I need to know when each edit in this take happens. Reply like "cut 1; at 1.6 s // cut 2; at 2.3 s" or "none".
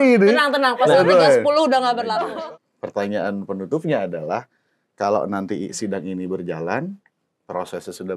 cut 1; at 2.1 s